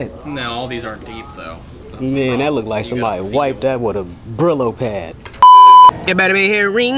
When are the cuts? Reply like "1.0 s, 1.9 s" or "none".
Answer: 5.3 s, 6.0 s

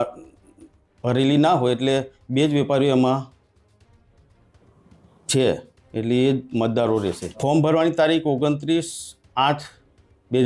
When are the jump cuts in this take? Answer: 7.3 s

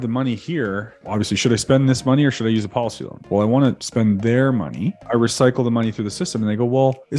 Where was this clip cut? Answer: 1.0 s, 3.2 s, 3.8 s, 5.0 s

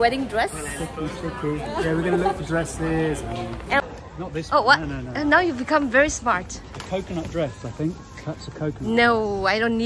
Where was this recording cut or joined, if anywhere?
3.8 s

